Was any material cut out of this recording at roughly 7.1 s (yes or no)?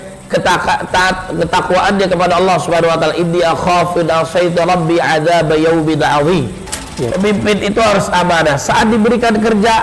yes